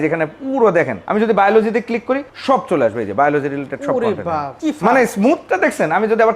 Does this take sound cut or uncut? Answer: cut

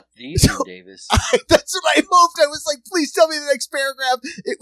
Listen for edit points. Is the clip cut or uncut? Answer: uncut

